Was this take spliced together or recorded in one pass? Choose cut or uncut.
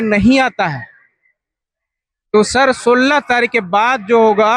uncut